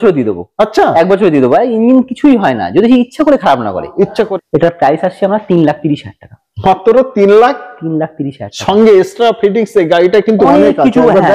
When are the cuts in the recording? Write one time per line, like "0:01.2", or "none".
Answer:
0:04.3